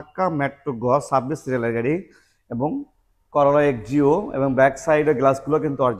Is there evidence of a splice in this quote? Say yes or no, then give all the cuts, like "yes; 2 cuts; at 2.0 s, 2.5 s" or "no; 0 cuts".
no; 0 cuts